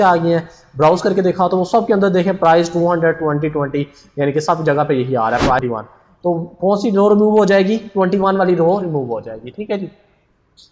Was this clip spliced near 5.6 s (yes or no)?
yes